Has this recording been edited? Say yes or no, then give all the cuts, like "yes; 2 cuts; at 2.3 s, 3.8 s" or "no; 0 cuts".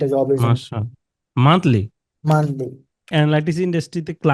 yes; 1 cut; at 3.1 s